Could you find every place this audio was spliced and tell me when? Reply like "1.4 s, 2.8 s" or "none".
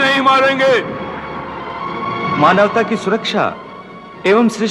none